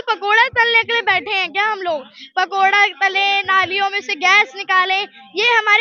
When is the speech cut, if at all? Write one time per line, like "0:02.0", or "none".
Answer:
none